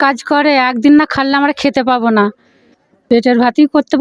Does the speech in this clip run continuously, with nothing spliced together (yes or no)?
yes